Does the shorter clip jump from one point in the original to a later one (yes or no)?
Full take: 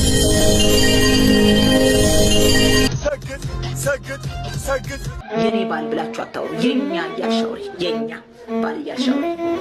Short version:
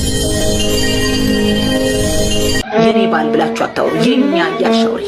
yes